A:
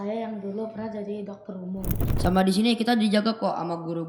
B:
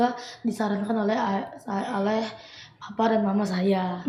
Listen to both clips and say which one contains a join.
A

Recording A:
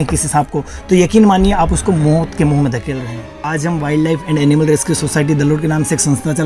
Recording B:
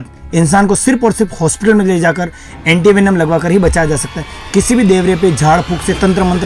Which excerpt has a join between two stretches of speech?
A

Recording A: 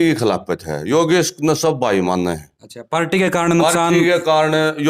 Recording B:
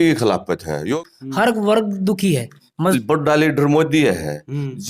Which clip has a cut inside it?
B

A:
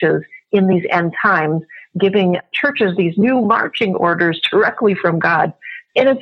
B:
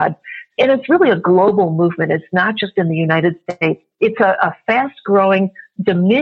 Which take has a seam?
B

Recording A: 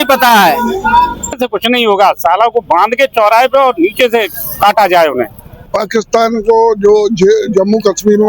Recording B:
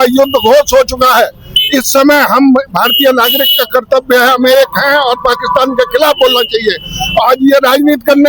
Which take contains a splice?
A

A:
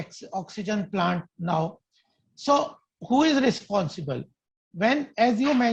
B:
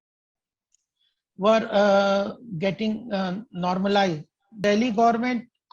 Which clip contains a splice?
B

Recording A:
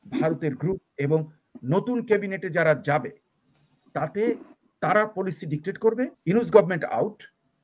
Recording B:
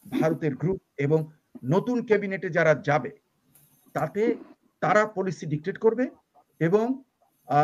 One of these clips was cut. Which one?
A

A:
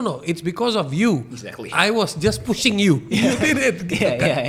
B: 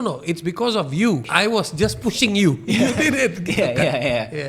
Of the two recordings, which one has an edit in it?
B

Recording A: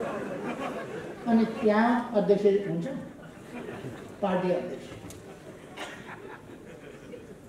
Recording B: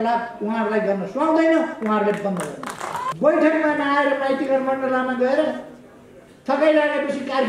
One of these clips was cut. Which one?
B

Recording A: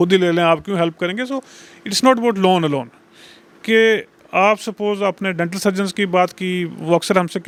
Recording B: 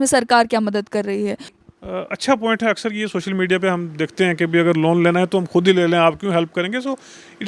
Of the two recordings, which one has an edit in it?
B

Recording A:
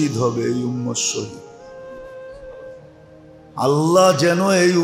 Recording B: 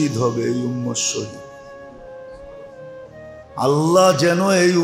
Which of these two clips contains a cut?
A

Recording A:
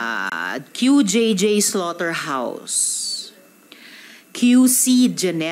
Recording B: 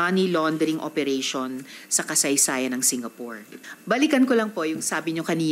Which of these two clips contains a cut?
B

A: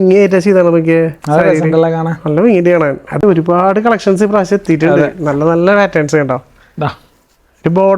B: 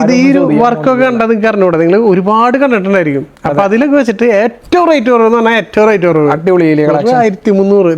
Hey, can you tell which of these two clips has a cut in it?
A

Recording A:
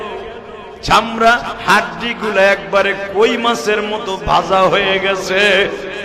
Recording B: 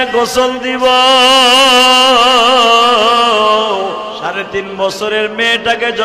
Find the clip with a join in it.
B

